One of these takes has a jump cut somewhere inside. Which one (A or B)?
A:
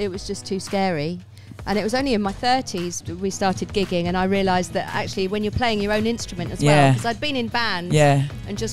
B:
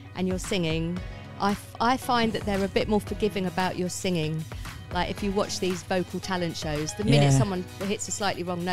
A